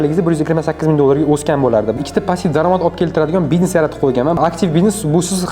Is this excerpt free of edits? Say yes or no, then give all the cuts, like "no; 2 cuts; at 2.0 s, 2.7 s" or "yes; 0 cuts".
no; 2 cuts; at 2.0 s, 4.4 s